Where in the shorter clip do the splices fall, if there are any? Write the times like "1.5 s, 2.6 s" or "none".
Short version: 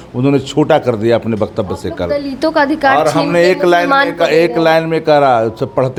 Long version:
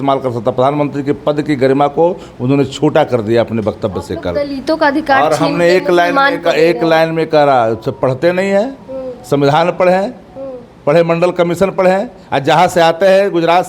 none